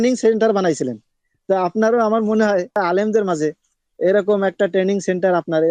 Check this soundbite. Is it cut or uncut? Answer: cut